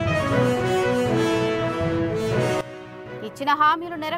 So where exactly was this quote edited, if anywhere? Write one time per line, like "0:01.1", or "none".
0:02.7